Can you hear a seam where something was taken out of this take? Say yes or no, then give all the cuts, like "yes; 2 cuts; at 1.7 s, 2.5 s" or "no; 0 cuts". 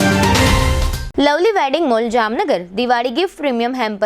yes; 1 cut; at 1.0 s